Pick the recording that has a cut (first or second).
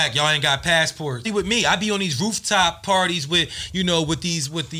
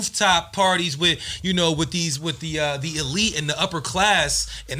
first